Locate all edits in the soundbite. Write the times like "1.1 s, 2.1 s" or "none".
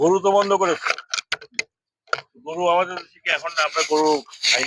none